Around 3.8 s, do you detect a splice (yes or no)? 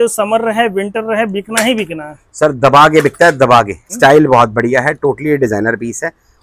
yes